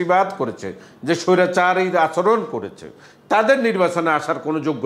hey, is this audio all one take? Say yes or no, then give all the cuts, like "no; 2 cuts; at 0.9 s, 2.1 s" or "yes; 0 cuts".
yes; 0 cuts